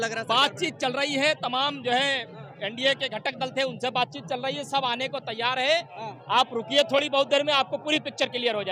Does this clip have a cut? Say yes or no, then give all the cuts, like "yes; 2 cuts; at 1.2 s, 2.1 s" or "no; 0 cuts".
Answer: no; 0 cuts